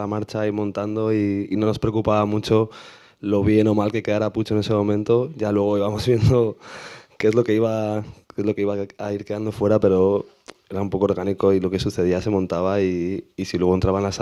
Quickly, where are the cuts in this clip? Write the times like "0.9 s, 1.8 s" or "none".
none

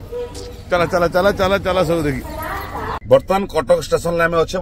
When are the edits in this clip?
2.9 s

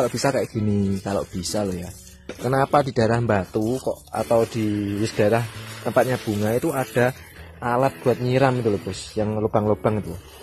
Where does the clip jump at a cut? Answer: none

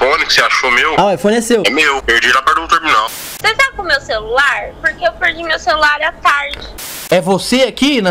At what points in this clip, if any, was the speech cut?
3.3 s, 6.7 s

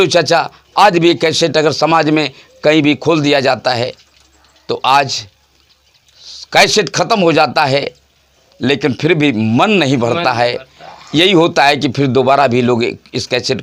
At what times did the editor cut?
none

